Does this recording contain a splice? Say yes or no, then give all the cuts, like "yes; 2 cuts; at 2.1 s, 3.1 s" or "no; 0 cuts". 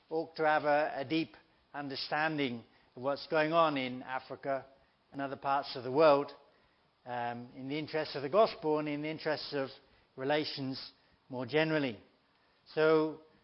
no; 0 cuts